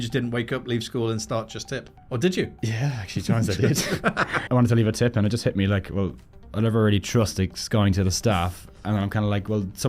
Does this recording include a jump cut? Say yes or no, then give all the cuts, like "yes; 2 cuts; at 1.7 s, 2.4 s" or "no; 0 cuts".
yes; 1 cut; at 4.3 s